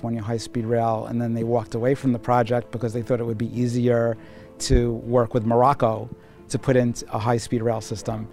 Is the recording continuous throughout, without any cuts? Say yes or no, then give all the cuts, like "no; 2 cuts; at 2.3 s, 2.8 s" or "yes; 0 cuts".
yes; 0 cuts